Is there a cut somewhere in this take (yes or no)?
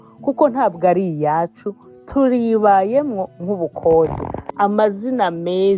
yes